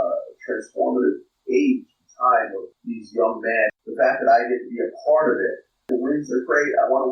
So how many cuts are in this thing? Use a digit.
4